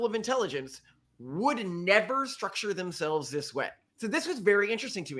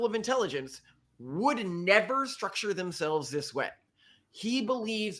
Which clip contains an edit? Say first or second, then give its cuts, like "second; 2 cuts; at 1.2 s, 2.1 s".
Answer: first; 1 cut; at 4.0 s